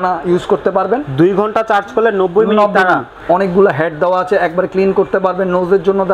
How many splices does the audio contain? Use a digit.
1